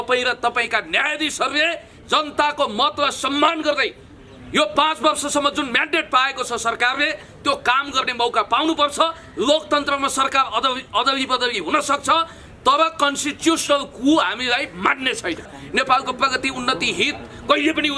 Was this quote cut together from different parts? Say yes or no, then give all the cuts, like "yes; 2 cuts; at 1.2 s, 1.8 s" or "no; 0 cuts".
yes; 1 cut; at 15.5 s